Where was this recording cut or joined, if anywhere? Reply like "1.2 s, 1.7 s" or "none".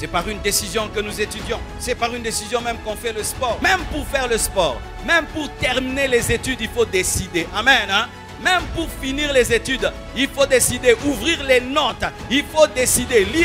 1.7 s, 3.6 s